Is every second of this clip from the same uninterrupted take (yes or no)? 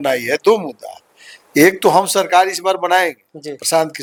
yes